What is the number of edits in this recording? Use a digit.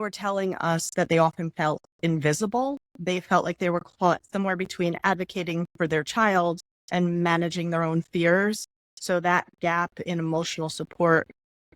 0